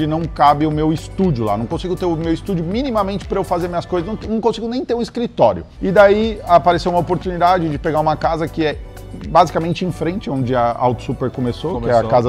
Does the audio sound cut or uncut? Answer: uncut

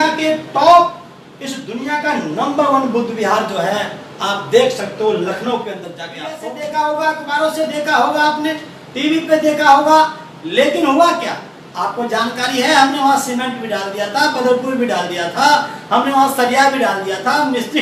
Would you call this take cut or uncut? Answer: cut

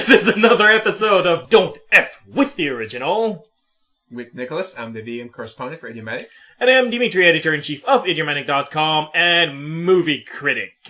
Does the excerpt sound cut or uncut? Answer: cut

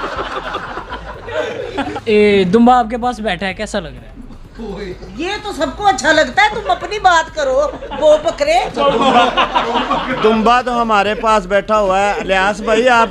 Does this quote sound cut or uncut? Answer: cut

